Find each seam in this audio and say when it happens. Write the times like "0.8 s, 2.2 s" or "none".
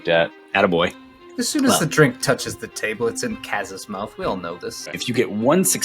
0.9 s, 5.0 s